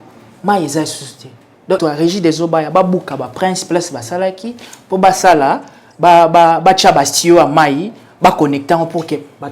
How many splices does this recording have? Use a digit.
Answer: 1